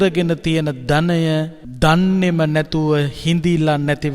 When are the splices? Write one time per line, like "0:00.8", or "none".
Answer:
0:01.6